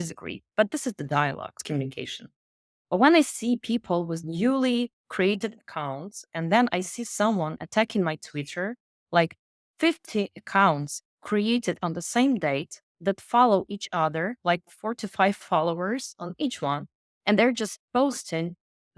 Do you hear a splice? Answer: no; 0 cuts

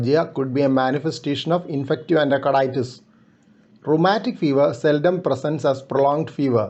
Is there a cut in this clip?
no; 0 cuts

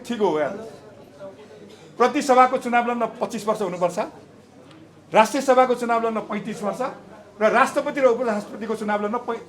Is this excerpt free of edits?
yes; 0 cuts

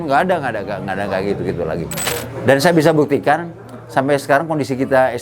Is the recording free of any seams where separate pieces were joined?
no; 1 cut; at 2.1 s

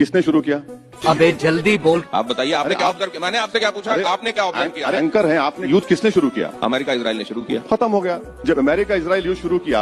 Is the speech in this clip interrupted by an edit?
no; 0 cuts

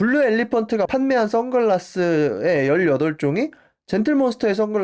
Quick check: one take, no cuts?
yes; 0 cuts

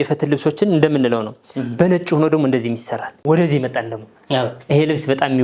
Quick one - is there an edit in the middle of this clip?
yes; 1 cut; at 3.1 s

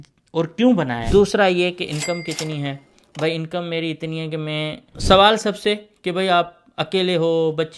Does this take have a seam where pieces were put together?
yes; 2 cuts; at 1.0 s, 4.9 s

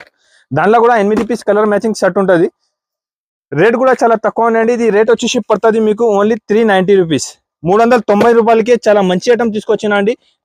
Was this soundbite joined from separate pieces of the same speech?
no; 0 cuts

